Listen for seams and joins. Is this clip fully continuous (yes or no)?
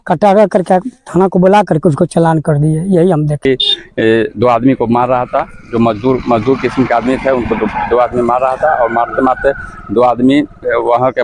no